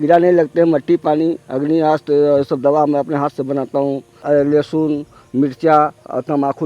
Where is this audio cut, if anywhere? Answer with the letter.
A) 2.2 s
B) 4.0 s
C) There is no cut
C